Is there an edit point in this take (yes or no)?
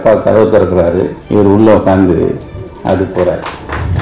yes